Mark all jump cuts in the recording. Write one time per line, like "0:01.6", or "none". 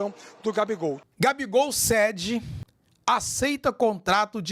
0:01.0
0:02.6